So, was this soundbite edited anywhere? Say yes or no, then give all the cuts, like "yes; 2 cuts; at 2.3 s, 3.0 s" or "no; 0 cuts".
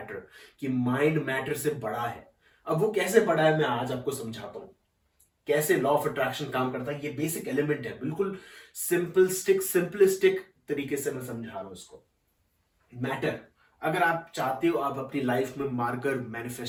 no; 0 cuts